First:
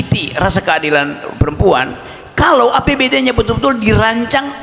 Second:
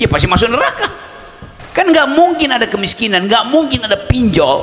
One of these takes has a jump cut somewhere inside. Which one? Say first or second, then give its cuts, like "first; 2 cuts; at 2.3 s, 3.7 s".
second; 1 cut; at 1.9 s